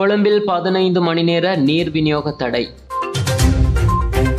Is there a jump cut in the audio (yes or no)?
no